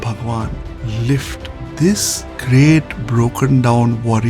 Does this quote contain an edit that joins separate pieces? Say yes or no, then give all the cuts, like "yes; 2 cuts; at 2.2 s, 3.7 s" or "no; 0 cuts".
no; 0 cuts